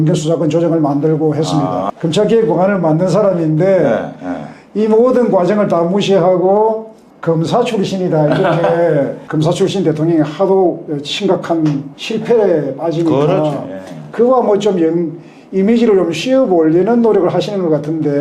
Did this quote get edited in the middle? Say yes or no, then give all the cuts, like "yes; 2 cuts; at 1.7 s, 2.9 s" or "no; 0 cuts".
yes; 2 cuts; at 1.9 s, 9.2 s